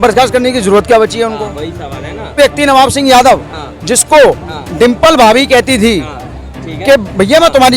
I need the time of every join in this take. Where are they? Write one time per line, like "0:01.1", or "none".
0:02.4